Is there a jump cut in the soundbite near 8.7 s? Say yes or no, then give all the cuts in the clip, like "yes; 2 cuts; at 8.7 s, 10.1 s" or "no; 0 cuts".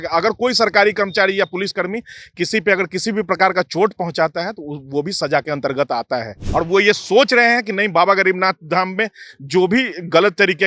no; 1 cut; at 6.4 s